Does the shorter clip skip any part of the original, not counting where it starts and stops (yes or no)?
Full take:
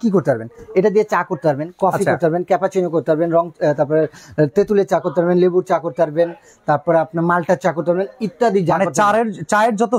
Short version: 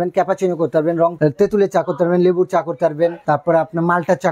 yes